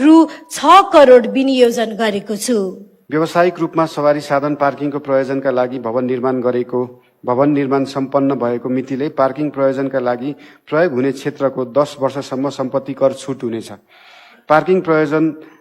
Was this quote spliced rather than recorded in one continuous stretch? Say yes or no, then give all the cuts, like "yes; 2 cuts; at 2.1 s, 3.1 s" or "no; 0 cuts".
yes; 1 cut; at 2.9 s